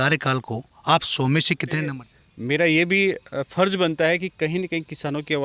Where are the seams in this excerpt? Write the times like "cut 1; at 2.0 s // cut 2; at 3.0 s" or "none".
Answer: cut 1; at 2.0 s